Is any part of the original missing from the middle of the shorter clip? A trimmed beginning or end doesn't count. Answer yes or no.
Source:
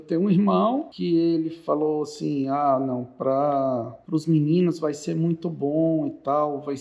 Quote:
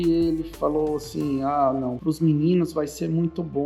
yes